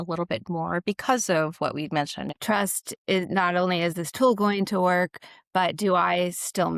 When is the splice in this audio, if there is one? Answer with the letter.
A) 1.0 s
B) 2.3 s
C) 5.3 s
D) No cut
B